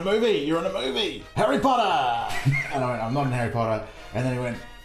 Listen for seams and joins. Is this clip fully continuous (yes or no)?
no